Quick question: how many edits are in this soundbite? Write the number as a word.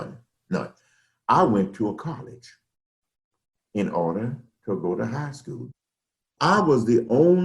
one